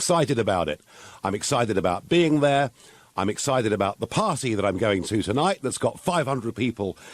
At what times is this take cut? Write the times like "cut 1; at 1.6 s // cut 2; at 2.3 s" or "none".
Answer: cut 1; at 6.1 s